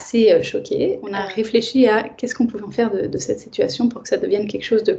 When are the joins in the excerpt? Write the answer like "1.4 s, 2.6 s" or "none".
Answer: 1.1 s